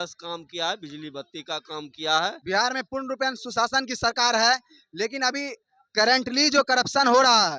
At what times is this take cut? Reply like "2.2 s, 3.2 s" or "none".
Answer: 2.4 s